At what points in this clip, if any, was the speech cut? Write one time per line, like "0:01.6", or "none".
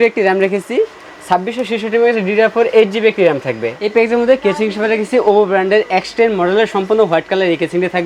0:03.8

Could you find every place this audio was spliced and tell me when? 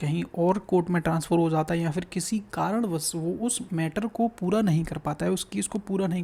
none

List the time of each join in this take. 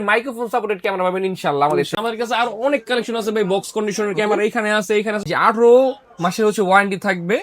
0:01.9
0:05.3

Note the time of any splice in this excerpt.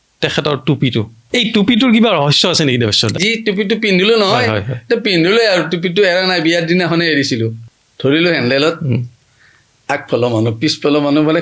0:01.2
0:03.2
0:07.6

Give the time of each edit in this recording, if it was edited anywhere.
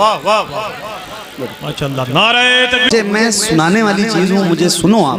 0:02.9

